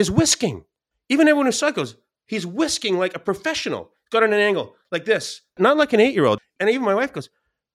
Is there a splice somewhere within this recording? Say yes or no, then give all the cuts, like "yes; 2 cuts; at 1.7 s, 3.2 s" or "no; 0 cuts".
no; 0 cuts